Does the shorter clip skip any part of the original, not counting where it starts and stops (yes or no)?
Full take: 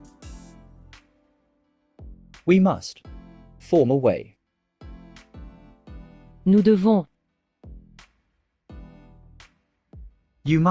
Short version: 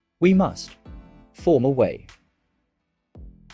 yes